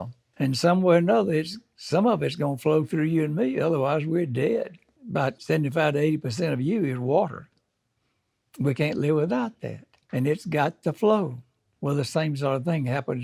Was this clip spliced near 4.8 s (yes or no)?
no